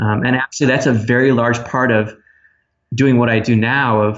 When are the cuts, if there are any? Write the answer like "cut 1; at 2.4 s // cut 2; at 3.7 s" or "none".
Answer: none